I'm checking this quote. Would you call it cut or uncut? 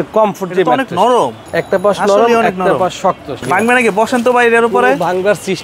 cut